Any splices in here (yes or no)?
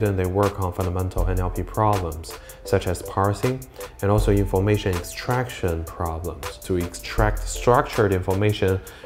yes